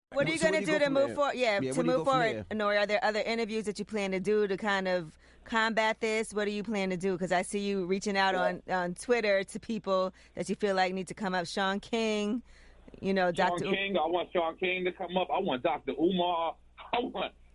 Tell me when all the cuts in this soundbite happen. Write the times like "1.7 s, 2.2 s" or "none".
0.9 s